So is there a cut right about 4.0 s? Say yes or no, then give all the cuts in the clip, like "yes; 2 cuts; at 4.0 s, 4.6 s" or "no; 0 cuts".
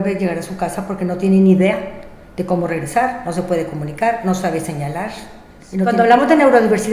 no; 1 cut; at 5.9 s